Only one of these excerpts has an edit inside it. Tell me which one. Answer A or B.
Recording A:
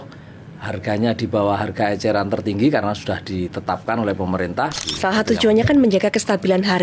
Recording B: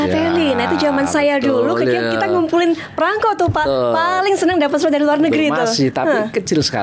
A